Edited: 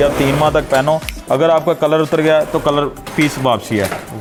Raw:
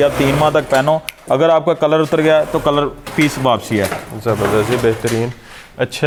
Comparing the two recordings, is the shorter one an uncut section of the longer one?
yes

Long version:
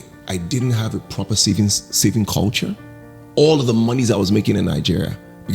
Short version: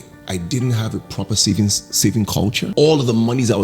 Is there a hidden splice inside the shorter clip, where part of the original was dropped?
yes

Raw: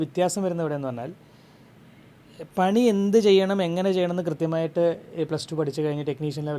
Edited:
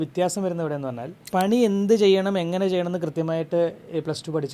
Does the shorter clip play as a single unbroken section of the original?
no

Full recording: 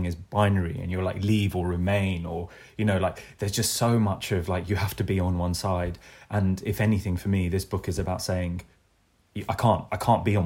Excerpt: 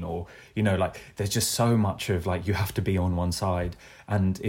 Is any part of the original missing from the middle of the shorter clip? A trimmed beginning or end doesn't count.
no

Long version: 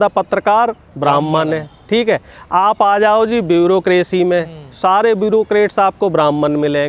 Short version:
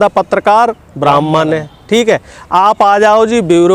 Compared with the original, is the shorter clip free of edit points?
yes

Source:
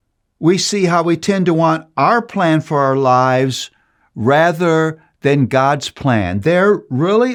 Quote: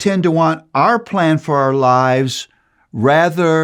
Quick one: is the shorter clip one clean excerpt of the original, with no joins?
yes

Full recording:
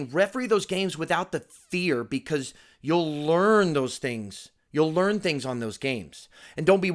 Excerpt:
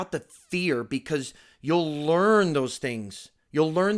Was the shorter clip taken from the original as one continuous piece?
yes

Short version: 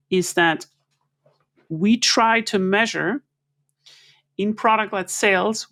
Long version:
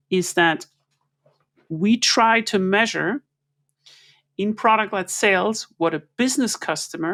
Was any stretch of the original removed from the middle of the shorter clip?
no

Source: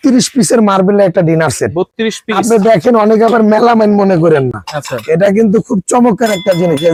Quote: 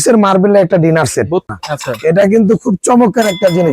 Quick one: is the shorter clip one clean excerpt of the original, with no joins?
no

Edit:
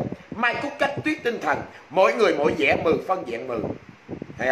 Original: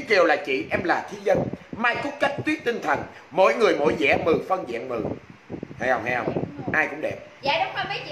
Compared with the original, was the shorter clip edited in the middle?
no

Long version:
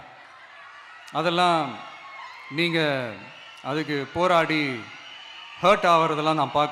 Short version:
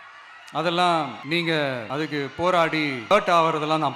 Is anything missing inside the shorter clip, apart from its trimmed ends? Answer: yes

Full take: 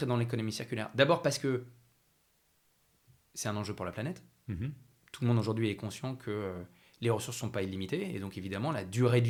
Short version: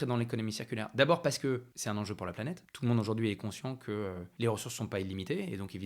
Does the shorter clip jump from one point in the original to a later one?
yes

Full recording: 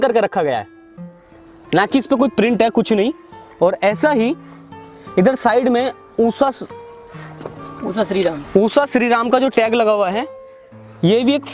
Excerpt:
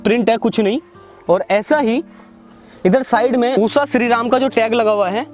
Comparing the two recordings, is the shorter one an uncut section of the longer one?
no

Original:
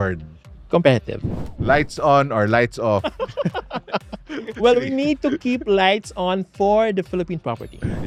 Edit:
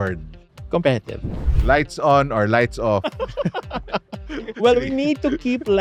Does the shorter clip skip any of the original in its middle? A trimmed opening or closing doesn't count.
no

